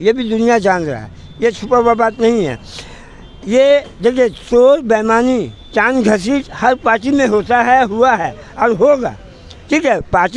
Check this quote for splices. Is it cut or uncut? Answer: uncut